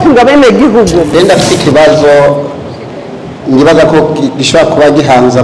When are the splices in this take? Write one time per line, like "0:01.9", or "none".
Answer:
0:01.1